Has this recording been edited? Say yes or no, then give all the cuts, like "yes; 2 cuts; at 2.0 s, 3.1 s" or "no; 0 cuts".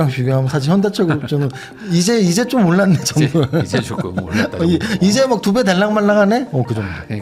no; 0 cuts